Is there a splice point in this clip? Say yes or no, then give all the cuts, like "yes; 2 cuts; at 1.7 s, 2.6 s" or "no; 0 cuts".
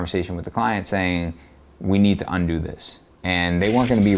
no; 0 cuts